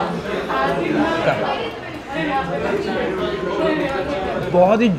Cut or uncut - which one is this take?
cut